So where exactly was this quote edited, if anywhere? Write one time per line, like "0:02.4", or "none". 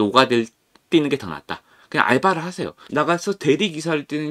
0:02.7